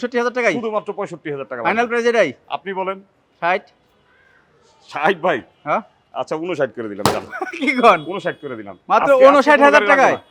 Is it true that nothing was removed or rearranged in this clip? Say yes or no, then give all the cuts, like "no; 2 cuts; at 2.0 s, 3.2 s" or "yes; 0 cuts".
yes; 0 cuts